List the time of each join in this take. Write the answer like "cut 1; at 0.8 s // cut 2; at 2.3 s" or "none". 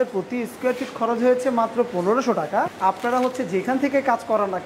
cut 1; at 2.7 s